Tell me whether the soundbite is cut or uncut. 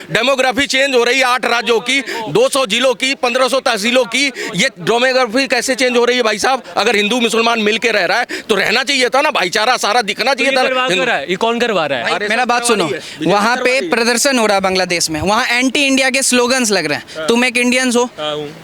uncut